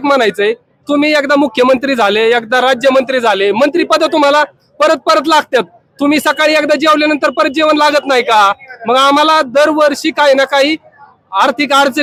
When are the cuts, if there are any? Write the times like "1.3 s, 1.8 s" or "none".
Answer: none

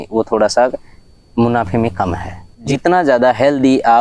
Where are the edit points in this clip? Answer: 2.7 s

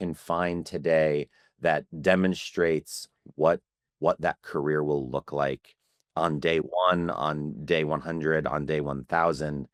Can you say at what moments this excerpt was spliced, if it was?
none

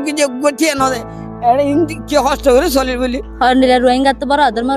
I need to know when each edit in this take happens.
3.2 s

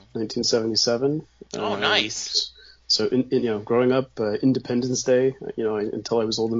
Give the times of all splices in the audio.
none

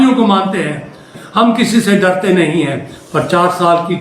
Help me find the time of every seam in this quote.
1.1 s

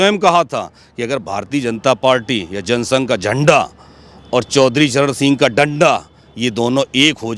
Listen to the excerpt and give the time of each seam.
none

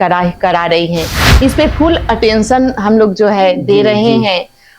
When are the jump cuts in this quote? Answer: 1.2 s

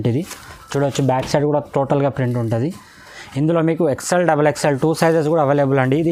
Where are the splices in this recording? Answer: none

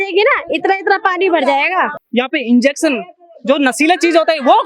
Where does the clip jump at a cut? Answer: 2.0 s

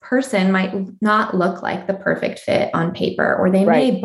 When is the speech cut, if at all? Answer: none

